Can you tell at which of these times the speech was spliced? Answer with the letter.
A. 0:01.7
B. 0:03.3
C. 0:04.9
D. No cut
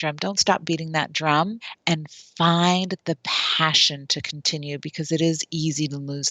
A